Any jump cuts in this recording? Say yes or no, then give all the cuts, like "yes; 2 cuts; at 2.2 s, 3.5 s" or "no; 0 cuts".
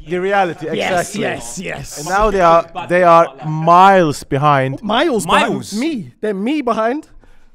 no; 0 cuts